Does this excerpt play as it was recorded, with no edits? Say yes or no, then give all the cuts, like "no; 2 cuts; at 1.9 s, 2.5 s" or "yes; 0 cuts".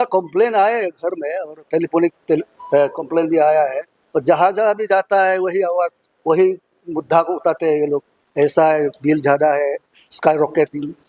yes; 0 cuts